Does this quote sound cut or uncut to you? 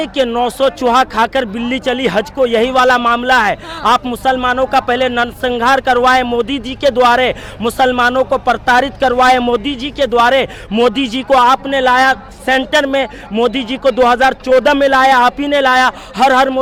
uncut